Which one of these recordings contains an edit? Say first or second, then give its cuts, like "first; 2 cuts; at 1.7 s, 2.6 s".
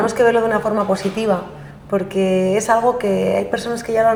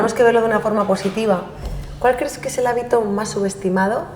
second; 1 cut; at 1.7 s